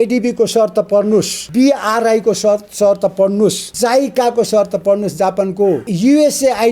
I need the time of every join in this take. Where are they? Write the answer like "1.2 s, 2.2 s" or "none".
1.4 s, 3.7 s, 5.9 s